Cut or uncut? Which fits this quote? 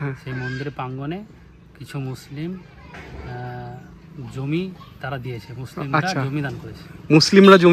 uncut